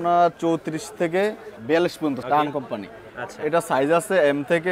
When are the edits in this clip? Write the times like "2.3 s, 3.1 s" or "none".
2.2 s